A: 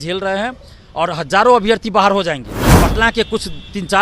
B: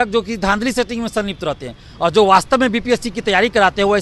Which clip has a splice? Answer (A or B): A